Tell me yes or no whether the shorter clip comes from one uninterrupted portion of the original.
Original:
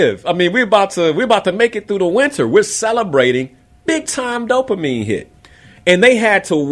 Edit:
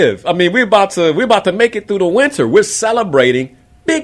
yes